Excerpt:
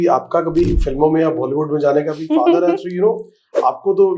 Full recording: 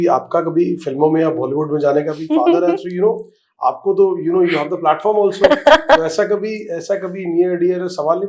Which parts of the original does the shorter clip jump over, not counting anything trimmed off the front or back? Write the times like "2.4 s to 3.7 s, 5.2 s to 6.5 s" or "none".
none